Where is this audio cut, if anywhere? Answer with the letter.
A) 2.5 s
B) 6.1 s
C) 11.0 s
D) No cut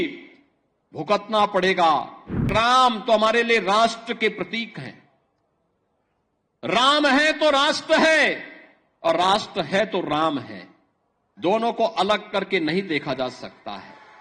A